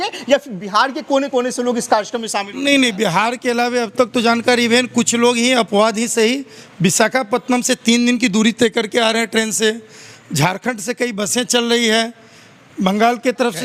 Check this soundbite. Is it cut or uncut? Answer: uncut